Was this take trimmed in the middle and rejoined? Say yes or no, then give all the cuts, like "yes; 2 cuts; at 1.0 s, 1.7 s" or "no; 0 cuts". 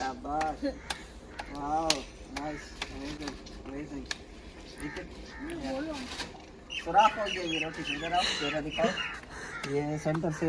no; 0 cuts